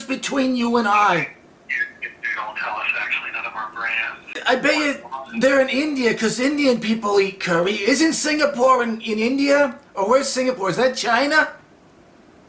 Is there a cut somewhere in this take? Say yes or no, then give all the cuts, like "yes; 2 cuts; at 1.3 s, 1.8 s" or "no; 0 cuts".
yes; 1 cut; at 4.4 s